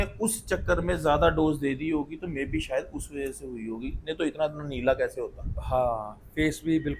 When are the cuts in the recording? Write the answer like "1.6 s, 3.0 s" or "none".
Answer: none